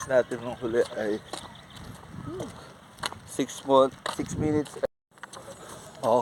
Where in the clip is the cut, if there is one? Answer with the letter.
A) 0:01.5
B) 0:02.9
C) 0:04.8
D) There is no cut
C